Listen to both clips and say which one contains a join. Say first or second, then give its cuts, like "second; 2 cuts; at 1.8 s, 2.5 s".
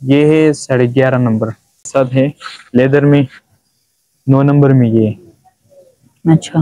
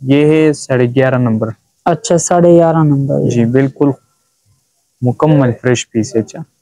first; 1 cut; at 1.8 s